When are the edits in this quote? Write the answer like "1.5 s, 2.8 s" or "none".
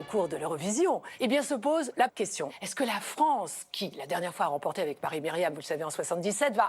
1.1 s, 2.2 s